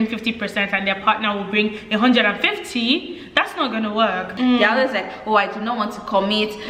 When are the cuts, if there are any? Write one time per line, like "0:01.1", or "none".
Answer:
0:04.3